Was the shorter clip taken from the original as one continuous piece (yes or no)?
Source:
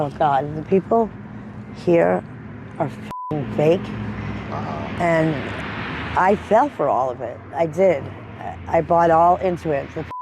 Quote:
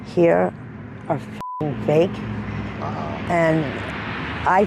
yes